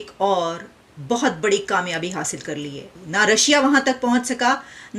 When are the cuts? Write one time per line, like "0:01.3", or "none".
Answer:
0:02.8

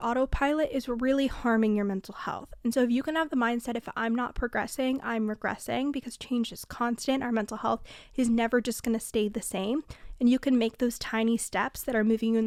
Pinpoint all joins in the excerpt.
none

